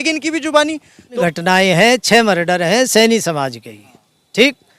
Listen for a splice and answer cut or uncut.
cut